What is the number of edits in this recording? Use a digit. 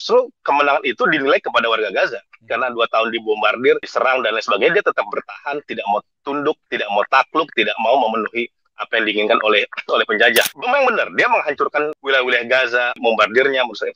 3